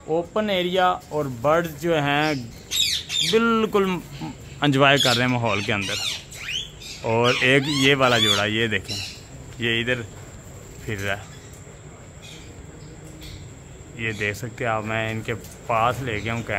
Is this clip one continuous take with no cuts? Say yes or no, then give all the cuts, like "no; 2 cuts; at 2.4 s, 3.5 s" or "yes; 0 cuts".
yes; 0 cuts